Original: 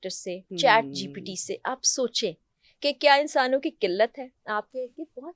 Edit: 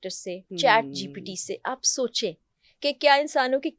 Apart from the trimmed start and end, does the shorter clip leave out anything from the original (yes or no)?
no